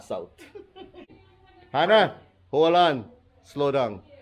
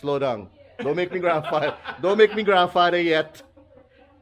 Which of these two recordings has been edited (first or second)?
first